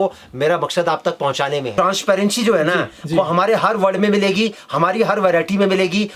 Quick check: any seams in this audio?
yes; 1 cut; at 1.7 s

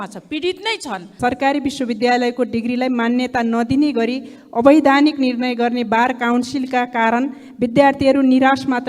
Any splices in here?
yes; 1 cut; at 1.1 s

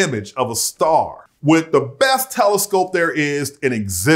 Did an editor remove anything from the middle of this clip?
yes; 1 cut; at 1.2 s

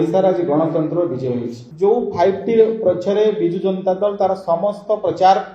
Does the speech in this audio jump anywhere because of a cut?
yes; 1 cut; at 1.6 s

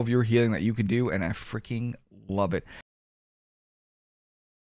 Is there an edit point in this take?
no; 0 cuts

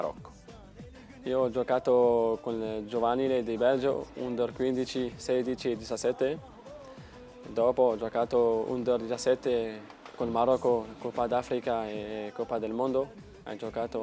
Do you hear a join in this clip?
yes; 1 cut; at 11.8 s

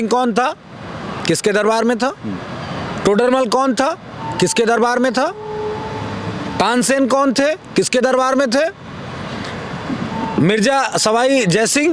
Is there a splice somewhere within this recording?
no; 0 cuts

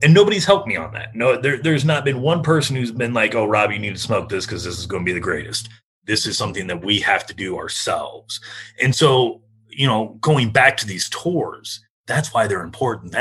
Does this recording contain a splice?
yes; 1 cut; at 11.9 s

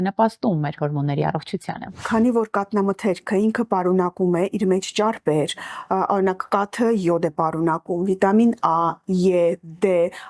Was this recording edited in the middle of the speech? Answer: yes; 1 cut; at 2.0 s

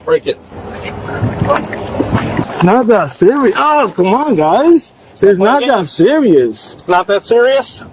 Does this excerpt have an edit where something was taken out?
yes; 2 cuts; at 2.4 s, 5.0 s

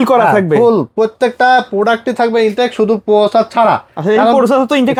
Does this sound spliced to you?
no; 0 cuts

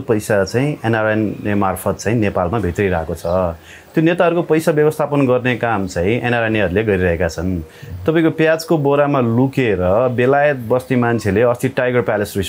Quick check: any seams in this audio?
no; 0 cuts

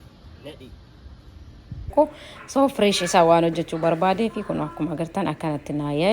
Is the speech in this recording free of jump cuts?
no; 1 cut; at 1.9 s

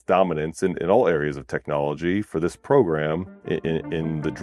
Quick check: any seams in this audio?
yes; 1 cut; at 3.3 s

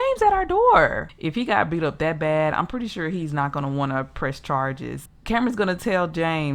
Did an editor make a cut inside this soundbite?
yes; 2 cuts; at 1.1 s, 5.1 s

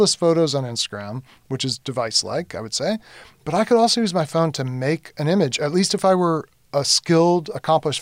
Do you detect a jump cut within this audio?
no; 0 cuts

